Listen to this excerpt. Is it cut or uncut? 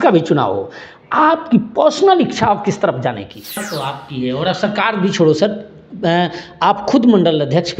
cut